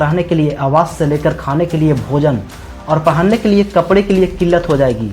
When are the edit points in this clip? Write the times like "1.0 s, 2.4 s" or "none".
none